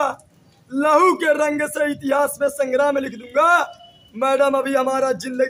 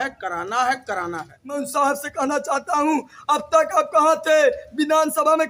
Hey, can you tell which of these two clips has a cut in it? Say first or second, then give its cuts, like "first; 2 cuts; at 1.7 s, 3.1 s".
second; 1 cut; at 1.6 s